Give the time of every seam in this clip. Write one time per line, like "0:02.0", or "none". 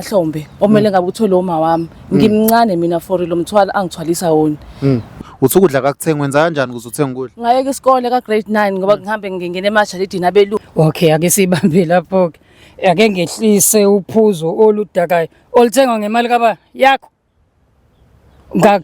0:05.1
0:10.6